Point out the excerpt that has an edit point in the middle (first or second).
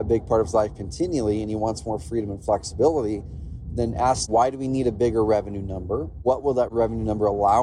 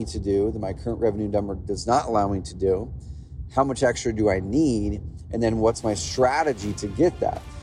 first